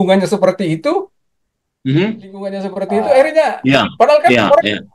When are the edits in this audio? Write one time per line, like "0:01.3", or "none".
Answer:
0:02.7